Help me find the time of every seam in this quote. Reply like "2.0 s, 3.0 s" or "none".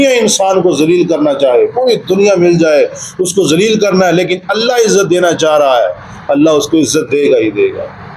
none